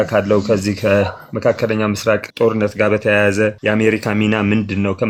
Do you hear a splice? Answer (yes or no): no